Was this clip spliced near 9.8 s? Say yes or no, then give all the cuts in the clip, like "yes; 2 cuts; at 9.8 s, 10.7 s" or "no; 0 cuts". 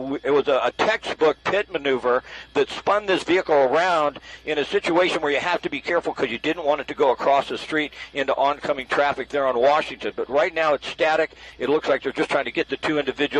no; 1 cut; at 7.6 s